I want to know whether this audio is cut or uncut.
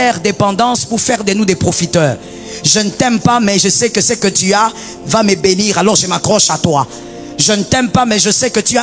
uncut